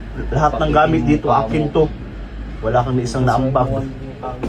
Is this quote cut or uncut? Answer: uncut